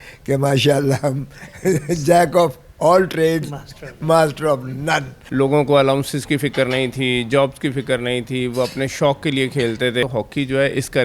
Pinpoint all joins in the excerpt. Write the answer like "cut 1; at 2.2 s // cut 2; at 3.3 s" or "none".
cut 1; at 5.2 s // cut 2; at 10.0 s